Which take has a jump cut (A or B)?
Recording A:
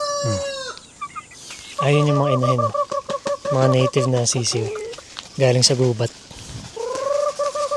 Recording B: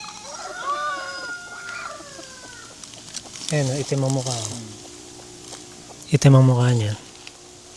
A